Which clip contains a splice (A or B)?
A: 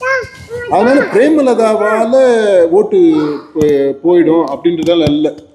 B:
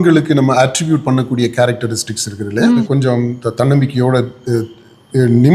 B